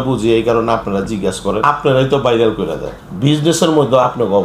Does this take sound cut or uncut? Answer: cut